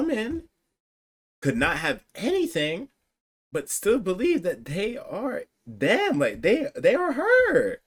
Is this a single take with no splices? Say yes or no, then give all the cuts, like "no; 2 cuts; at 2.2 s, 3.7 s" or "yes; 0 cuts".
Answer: yes; 0 cuts